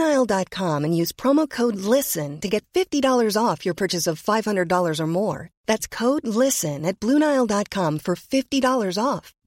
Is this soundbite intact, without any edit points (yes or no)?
yes